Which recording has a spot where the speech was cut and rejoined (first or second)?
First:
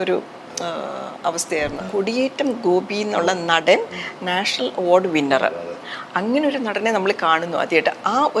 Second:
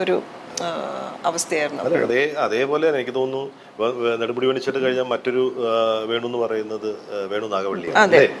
first